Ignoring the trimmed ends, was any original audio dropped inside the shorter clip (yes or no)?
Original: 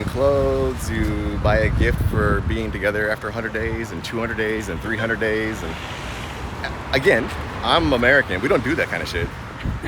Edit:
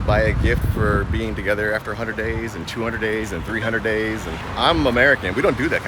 yes